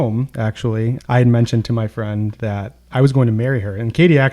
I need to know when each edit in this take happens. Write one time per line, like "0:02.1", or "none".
0:01.0
0:02.7